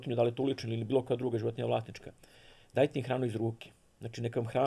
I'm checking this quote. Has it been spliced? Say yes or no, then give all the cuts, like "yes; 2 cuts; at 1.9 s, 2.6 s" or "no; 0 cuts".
no; 0 cuts